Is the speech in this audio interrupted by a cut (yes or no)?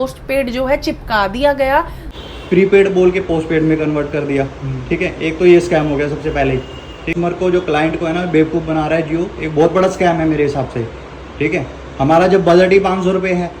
yes